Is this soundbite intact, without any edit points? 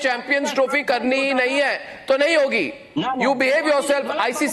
yes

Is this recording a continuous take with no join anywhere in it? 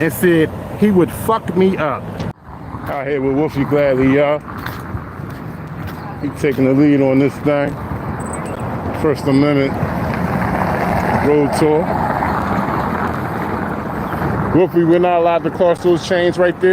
no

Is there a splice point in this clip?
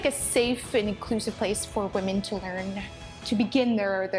no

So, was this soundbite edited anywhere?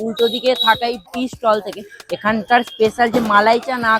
yes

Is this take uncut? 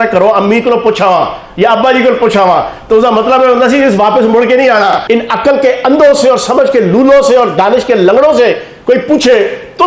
no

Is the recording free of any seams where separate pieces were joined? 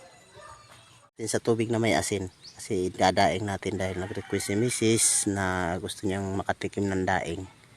no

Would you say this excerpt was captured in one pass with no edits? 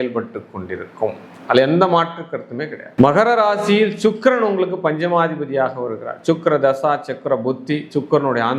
yes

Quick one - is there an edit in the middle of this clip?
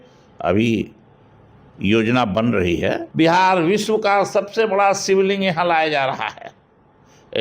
yes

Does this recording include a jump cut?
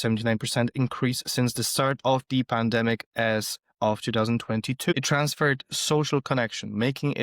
yes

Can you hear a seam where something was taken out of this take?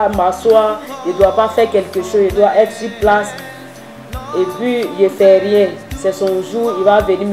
no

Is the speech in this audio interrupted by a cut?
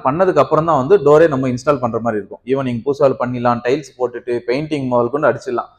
no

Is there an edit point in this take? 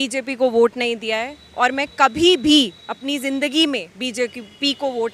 no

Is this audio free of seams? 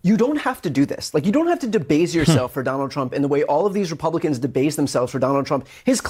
yes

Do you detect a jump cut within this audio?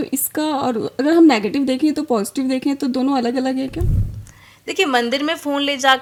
no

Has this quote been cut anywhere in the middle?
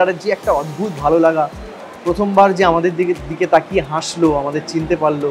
no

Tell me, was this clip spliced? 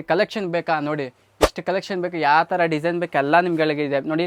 no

